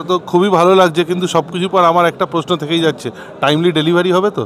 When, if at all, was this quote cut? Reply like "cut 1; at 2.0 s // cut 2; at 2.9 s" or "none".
none